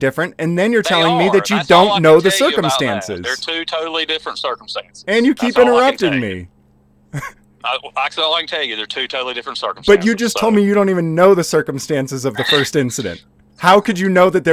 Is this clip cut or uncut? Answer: uncut